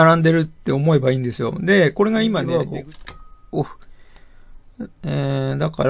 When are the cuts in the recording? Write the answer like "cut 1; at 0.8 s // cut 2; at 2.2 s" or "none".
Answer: cut 1; at 2.5 s